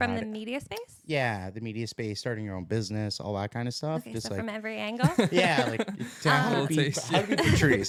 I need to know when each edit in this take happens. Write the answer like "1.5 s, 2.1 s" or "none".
none